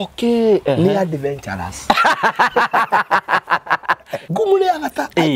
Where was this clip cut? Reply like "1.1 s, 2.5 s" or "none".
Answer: 4.2 s